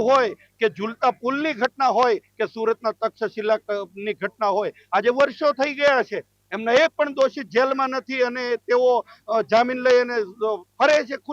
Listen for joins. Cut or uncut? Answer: uncut